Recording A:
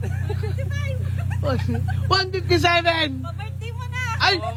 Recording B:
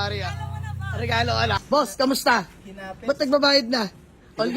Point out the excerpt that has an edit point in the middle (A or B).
B